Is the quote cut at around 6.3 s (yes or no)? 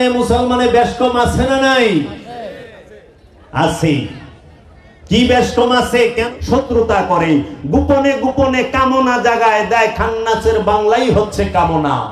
yes